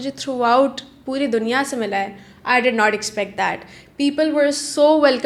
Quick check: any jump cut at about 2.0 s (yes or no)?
no